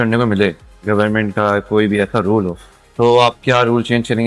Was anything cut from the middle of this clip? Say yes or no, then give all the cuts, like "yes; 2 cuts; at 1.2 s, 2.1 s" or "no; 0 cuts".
no; 0 cuts